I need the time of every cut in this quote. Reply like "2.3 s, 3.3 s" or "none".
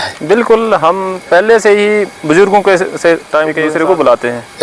3.6 s